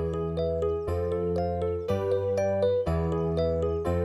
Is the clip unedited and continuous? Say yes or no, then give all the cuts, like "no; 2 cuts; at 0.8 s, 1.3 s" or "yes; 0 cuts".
yes; 0 cuts